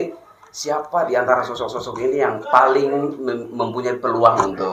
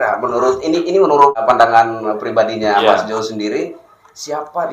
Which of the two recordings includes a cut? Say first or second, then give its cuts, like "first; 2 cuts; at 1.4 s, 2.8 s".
second; 1 cut; at 1.4 s